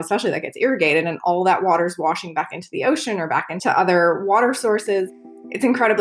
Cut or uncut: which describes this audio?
cut